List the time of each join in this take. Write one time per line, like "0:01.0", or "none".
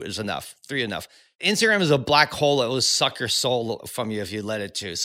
0:01.4